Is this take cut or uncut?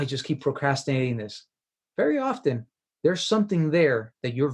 uncut